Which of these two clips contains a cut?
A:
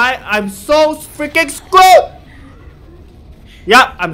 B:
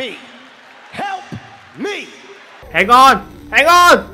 B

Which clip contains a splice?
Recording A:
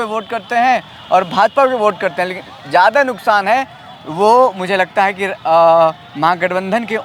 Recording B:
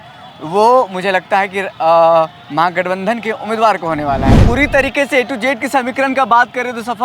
B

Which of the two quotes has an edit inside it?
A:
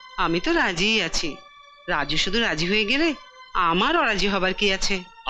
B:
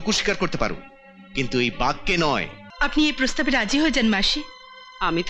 B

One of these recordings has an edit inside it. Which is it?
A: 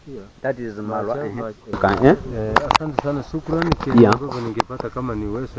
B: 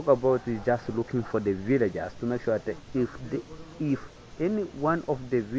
A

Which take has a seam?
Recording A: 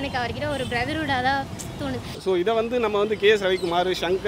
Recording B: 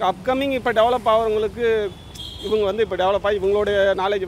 A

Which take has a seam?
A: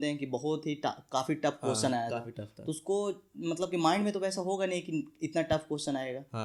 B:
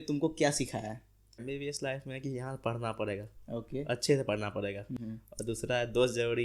B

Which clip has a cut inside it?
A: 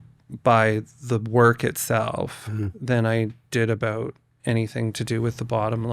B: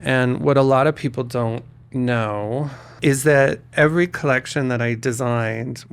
B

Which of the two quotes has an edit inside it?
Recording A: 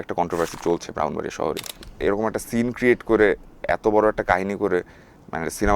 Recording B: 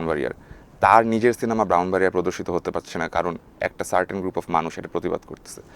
A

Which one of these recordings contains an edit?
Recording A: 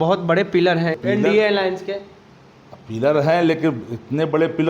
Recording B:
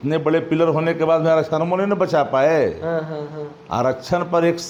A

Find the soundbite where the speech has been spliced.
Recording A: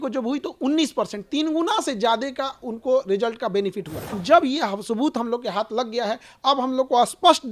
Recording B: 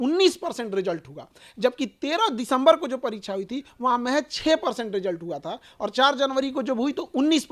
A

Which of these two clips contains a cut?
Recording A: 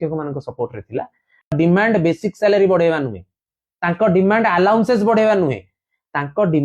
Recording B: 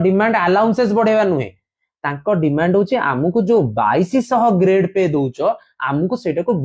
A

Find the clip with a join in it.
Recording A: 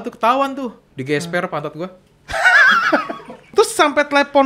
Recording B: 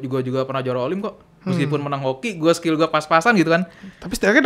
A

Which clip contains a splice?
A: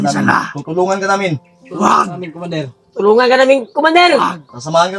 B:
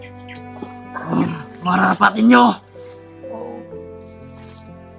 B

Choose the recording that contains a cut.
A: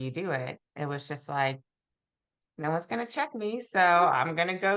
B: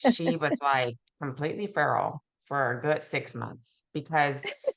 B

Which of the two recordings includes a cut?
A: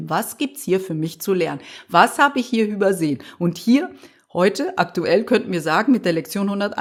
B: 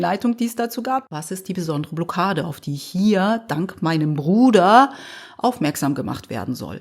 B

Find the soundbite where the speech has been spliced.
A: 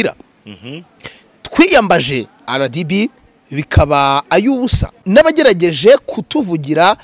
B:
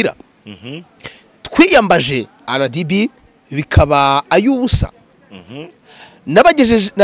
A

